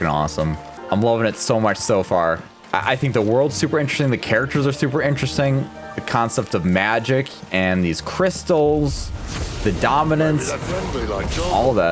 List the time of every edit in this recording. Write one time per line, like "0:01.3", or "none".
none